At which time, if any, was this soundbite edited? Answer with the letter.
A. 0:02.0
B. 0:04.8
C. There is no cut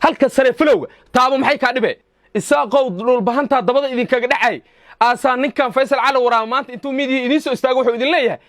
A